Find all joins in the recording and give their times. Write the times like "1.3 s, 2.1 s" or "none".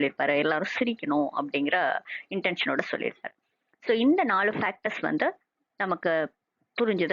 2.5 s